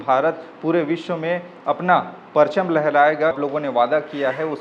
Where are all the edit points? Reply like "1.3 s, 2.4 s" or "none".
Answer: 3.4 s